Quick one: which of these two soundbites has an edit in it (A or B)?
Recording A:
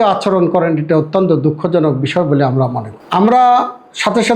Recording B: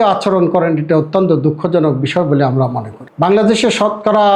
B